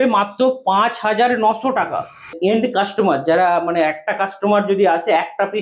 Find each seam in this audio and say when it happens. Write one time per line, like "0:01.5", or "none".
0:02.4